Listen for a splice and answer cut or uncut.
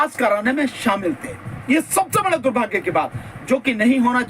uncut